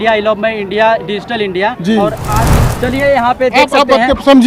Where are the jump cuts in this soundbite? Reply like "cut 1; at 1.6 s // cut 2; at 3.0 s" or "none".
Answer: cut 1; at 2.6 s